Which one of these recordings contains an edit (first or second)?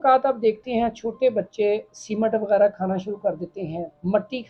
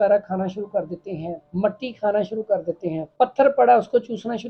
second